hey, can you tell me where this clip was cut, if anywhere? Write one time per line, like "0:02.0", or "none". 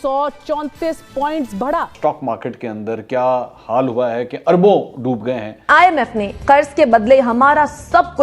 0:02.2
0:05.7